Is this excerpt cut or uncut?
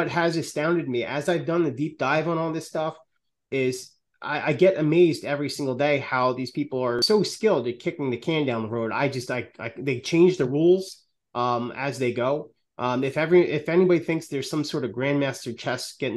cut